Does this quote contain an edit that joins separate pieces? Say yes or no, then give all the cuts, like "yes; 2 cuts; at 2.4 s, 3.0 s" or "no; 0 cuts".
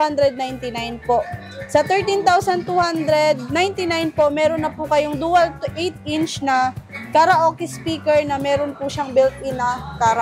no; 0 cuts